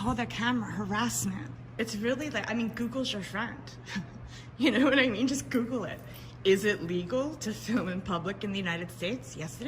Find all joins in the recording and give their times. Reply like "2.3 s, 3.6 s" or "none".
1.6 s